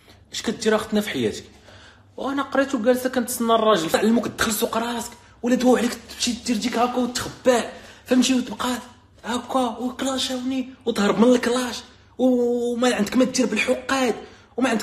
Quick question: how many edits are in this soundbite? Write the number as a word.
one